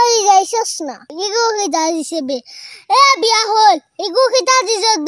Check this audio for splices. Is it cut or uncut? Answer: cut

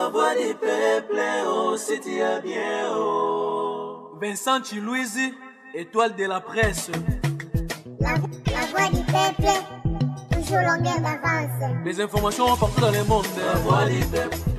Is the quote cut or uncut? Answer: uncut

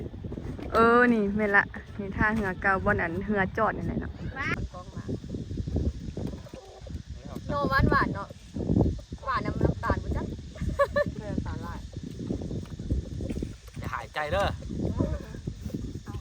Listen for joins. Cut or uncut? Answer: cut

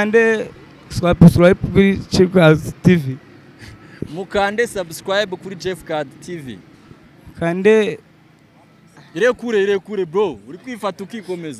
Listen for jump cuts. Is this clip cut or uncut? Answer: uncut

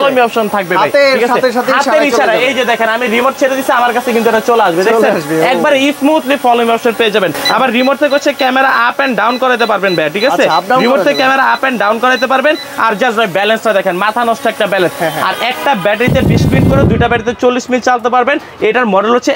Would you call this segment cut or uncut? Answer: uncut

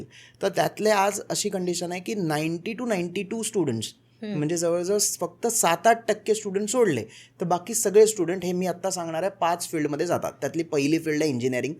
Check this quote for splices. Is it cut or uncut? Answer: uncut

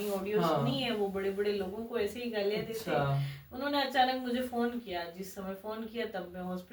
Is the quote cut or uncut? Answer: uncut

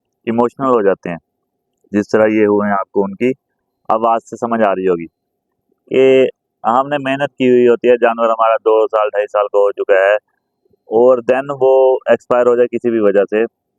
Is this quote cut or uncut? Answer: uncut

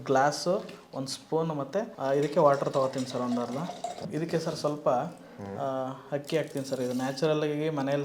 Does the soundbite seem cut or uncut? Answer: uncut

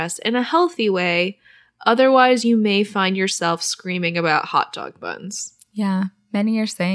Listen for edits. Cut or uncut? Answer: cut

